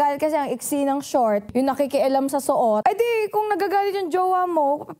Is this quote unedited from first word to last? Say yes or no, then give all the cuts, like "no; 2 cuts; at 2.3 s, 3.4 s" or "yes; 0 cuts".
no; 2 cuts; at 1.5 s, 2.8 s